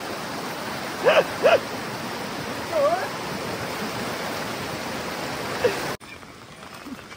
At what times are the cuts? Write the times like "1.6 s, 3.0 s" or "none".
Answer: 6.0 s